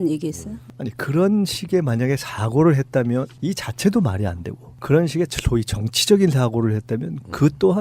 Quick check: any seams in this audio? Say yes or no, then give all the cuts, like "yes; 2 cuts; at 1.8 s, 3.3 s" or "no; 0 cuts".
yes; 1 cut; at 6.4 s